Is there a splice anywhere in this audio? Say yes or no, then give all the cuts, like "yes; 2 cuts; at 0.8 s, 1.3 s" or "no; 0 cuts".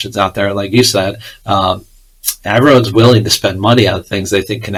no; 0 cuts